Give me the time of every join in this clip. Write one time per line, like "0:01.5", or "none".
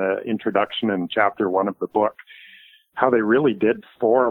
none